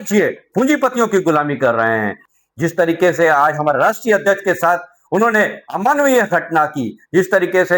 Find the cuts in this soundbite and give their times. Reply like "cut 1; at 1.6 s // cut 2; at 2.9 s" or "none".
cut 1; at 2.2 s